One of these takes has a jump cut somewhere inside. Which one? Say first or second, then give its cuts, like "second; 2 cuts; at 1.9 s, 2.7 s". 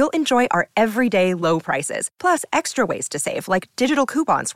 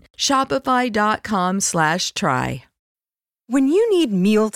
second; 1 cut; at 2.9 s